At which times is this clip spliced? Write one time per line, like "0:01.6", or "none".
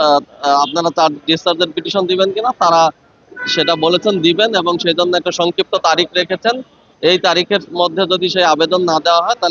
none